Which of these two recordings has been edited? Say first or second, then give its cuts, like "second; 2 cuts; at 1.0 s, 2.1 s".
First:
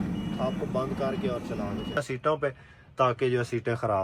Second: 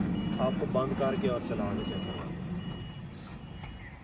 first; 1 cut; at 2.0 s